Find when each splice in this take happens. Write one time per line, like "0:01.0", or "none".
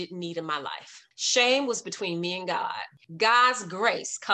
0:02.9